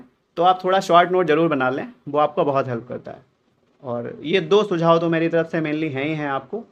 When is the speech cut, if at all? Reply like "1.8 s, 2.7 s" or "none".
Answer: none

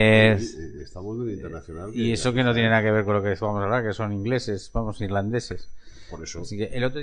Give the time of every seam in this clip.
1.0 s

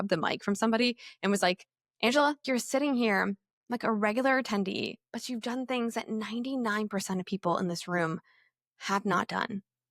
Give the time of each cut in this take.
2.4 s

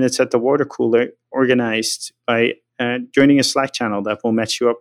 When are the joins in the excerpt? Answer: 2.7 s

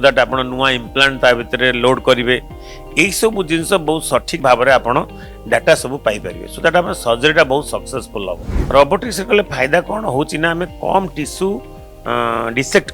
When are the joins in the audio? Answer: 8.5 s

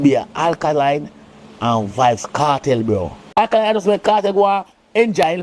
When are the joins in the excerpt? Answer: 3.2 s

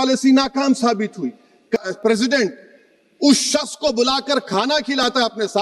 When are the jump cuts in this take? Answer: 1.8 s

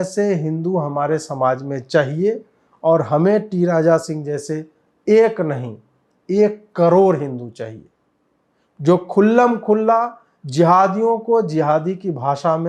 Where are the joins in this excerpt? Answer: none

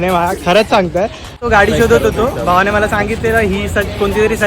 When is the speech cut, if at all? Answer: 1.4 s

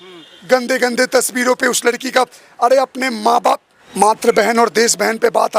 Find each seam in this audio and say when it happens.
3.8 s

